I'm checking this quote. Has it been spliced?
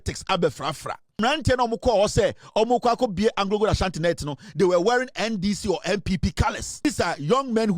yes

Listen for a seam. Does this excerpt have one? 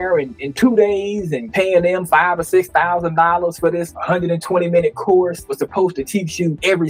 no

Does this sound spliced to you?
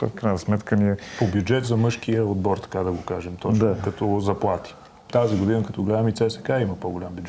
yes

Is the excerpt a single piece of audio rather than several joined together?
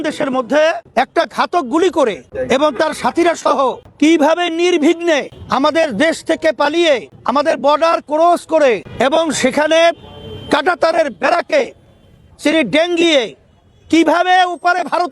no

